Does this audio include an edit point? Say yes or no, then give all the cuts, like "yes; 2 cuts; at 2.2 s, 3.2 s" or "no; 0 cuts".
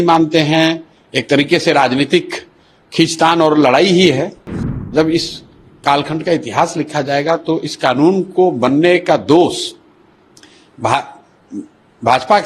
yes; 1 cut; at 4.8 s